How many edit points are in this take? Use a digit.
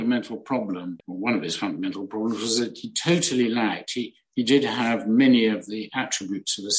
1